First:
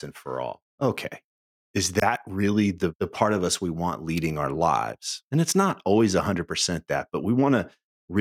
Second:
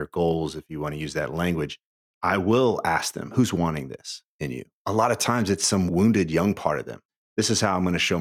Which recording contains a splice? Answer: second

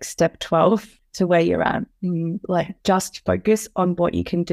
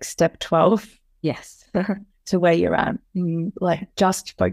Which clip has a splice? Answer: first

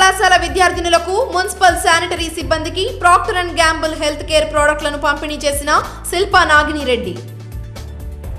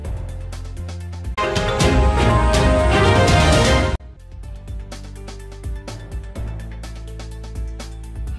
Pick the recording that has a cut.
first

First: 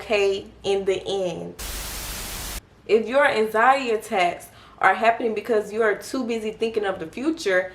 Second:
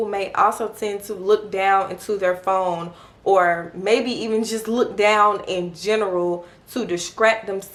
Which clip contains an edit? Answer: first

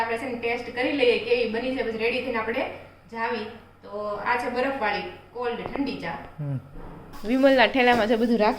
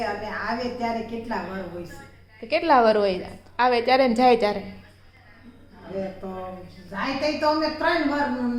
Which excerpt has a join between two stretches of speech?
first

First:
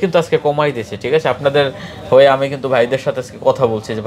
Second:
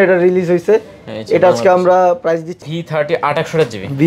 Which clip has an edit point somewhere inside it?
second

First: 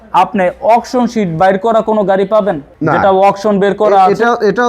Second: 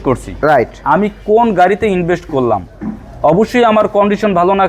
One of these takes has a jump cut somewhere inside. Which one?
first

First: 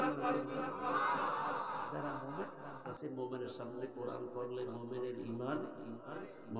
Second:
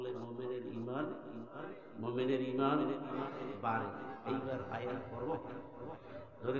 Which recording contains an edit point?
first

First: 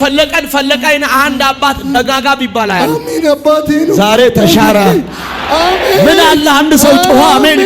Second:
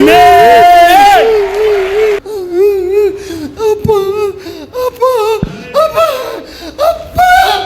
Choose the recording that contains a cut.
second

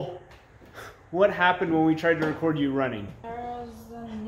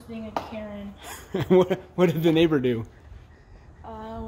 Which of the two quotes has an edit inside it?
first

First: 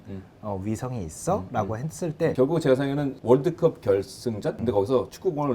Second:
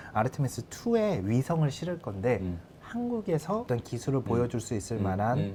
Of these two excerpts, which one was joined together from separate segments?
first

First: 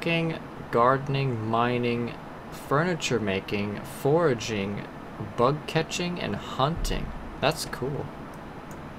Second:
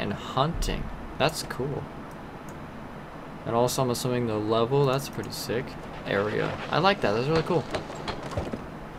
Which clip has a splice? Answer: second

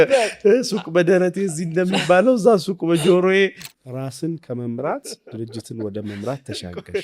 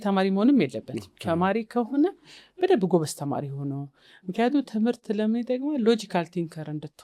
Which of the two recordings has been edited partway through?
first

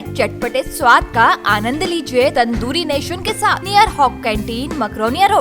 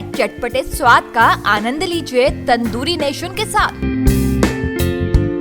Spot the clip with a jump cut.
first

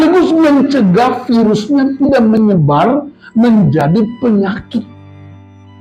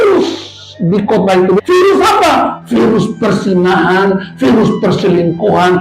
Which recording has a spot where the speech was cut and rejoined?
second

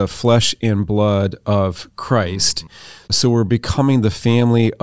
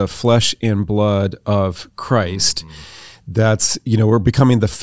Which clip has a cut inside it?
first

